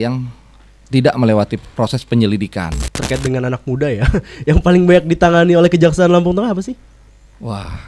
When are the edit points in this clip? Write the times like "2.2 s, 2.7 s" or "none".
2.9 s